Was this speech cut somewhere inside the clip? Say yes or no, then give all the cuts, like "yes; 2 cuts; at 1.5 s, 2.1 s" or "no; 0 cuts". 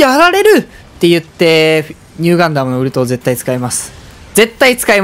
no; 0 cuts